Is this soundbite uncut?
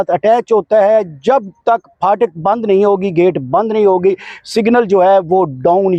yes; 0 cuts

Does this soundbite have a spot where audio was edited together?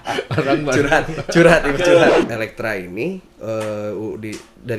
yes; 1 cut; at 2.3 s

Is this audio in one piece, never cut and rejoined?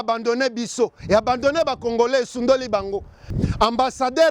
no; 1 cut; at 3.2 s

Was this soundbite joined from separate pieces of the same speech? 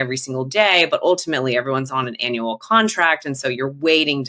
no; 0 cuts

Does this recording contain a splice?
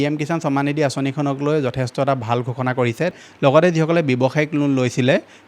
yes; 1 cut; at 3.1 s

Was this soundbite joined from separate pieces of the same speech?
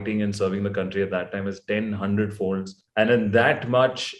yes; 1 cut; at 2.8 s

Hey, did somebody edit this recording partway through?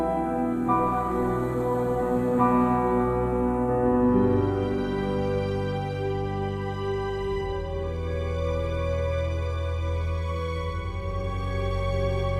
no; 0 cuts

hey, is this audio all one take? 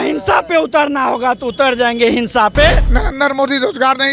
no; 1 cut; at 2.9 s

